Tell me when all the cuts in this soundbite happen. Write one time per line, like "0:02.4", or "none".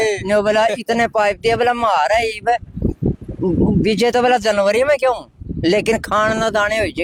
none